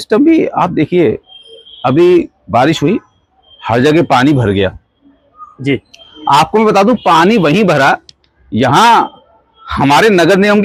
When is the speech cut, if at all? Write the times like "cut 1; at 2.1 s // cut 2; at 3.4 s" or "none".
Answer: none